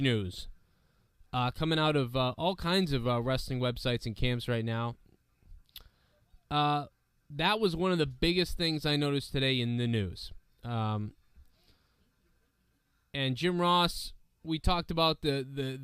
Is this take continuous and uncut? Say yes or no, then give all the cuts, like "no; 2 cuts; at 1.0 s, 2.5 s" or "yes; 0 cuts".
no; 1 cut; at 3.5 s